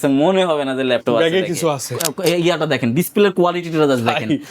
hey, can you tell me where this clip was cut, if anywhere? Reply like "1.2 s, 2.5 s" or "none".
2.0 s